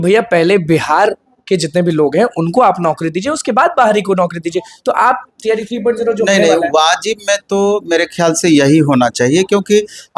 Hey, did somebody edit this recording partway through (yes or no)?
no